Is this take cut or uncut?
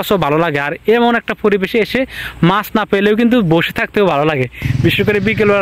uncut